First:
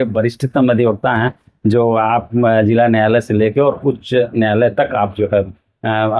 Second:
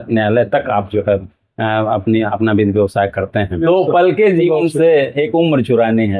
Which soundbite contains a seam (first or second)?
second